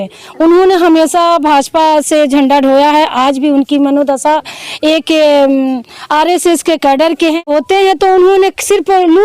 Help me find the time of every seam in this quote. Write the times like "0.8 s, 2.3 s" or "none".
7.4 s